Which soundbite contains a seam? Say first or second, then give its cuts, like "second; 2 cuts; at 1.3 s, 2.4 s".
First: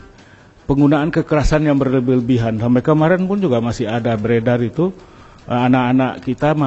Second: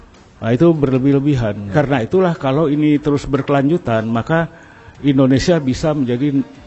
second; 1 cut; at 1.7 s